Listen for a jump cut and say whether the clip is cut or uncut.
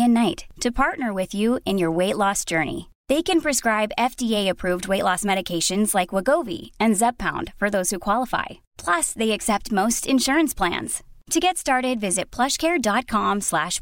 uncut